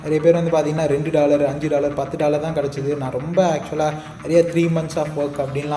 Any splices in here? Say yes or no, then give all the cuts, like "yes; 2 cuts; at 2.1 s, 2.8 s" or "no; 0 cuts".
no; 0 cuts